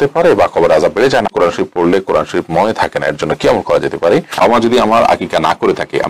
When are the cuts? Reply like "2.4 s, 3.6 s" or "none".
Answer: 1.3 s, 4.4 s